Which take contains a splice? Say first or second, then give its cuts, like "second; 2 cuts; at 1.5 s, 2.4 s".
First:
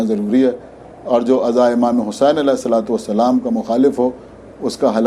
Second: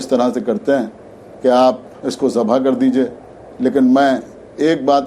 second; 1 cut; at 1.9 s